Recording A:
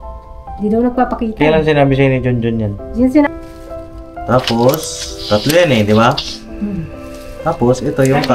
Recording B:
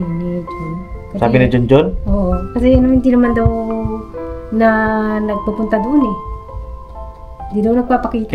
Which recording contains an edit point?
A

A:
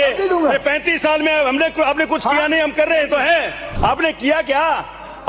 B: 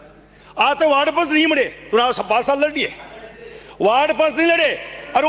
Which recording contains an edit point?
A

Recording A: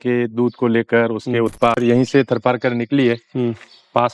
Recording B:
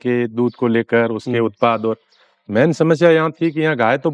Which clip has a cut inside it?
A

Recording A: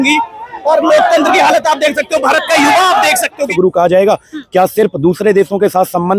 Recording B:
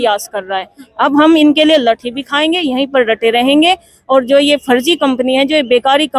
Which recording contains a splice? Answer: A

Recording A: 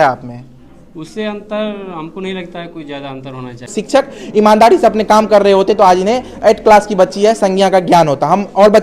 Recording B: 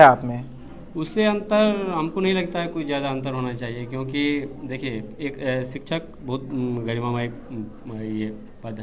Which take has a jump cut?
A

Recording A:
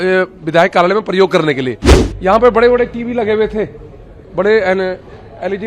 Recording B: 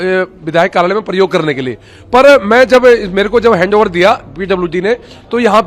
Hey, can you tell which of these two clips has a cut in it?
A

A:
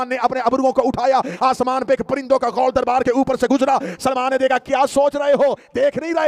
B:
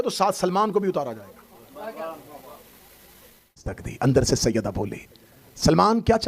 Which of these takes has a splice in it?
B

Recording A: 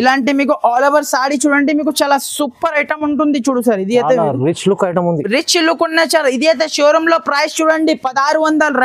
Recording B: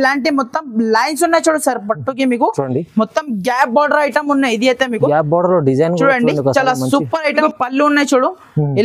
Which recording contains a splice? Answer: B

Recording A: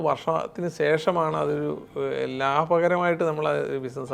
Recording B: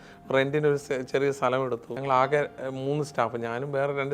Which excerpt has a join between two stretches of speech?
B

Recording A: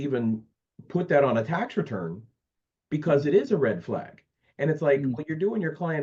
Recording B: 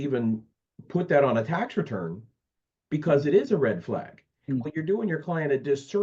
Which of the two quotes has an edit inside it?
B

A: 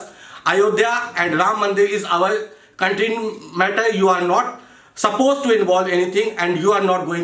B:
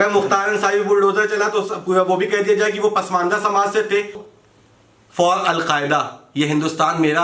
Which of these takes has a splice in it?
B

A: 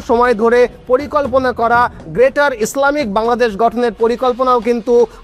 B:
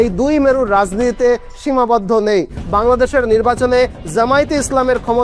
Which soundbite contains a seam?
B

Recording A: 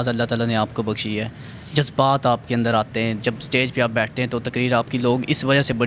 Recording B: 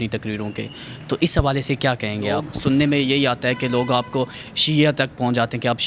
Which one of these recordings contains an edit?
B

